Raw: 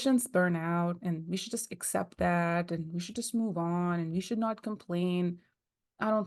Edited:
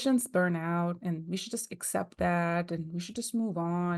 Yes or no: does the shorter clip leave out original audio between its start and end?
no